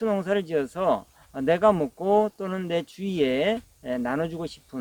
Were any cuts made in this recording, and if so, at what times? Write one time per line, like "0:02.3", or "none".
none